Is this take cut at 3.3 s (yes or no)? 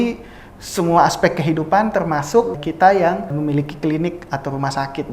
yes